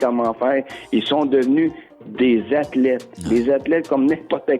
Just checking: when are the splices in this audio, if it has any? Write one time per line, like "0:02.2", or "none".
0:03.1